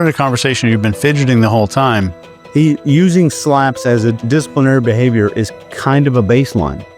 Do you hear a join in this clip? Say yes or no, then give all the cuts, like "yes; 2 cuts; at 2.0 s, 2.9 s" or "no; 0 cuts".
yes; 1 cut; at 2.2 s